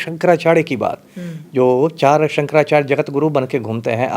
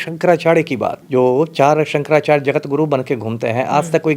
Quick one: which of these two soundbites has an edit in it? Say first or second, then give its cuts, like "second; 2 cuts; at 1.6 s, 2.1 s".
second; 1 cut; at 1.0 s